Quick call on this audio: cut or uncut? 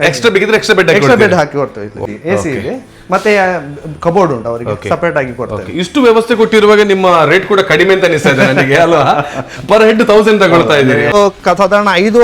cut